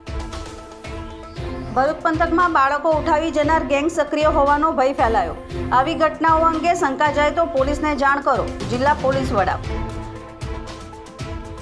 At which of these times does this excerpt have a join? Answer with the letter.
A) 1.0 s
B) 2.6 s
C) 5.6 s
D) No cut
A